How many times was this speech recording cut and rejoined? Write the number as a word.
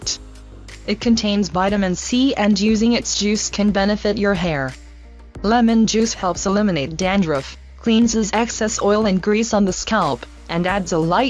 one